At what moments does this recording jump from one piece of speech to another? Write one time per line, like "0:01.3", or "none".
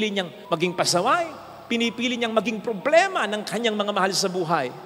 none